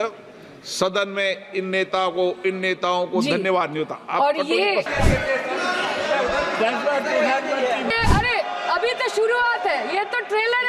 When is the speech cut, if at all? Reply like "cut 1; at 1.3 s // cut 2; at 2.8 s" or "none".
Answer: cut 1; at 4.9 s // cut 2; at 7.9 s